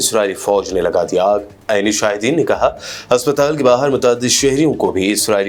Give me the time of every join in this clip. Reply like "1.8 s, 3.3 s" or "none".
none